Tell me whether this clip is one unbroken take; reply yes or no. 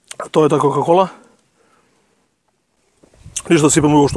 no